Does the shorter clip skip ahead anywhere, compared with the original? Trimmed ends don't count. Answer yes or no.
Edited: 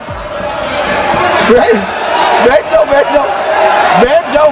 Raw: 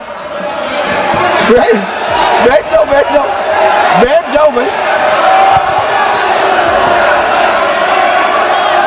no